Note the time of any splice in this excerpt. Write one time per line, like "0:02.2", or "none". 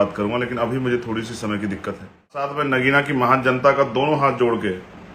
0:02.6